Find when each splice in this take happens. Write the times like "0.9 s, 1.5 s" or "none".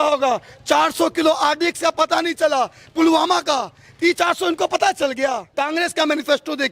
5.5 s